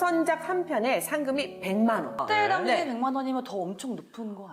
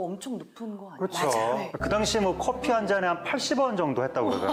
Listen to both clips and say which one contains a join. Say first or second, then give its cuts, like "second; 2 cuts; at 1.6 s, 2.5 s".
first; 1 cut; at 2.2 s